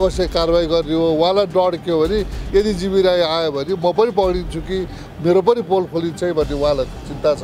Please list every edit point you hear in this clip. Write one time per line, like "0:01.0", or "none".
none